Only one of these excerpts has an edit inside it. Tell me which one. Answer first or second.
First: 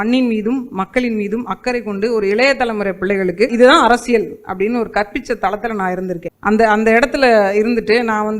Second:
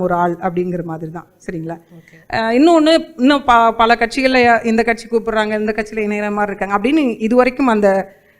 first